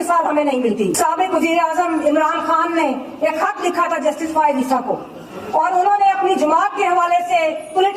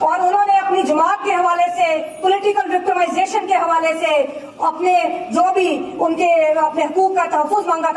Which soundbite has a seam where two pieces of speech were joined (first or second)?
first